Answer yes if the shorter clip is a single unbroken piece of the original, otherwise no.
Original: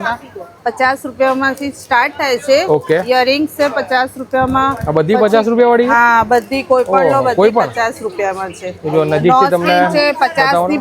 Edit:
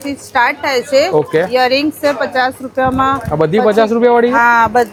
yes